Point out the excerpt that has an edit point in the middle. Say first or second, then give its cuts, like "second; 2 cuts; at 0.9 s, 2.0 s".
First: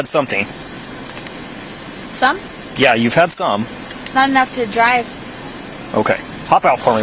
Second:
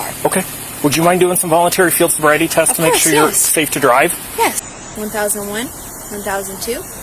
second; 1 cut; at 4.6 s